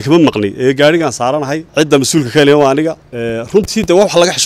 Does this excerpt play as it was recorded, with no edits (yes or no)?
no